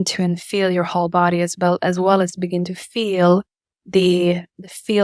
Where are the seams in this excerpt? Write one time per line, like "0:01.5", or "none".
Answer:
none